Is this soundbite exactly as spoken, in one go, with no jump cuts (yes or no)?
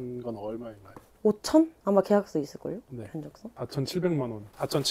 yes